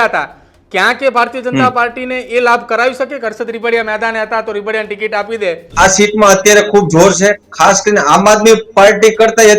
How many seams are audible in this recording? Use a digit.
1